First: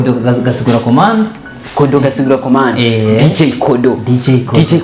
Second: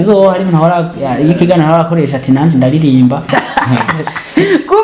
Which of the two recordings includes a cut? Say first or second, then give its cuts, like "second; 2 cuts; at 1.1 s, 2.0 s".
second; 1 cut; at 3.3 s